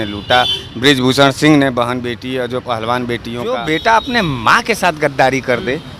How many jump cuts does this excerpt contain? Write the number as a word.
one